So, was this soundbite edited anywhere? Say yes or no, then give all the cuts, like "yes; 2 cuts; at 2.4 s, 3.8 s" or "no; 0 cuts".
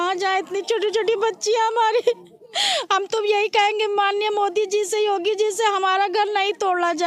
no; 0 cuts